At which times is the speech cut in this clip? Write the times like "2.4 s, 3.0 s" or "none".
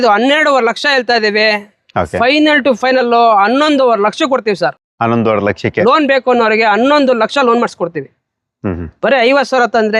none